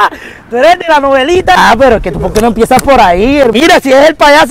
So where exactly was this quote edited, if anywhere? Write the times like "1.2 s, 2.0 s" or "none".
1.6 s, 3.5 s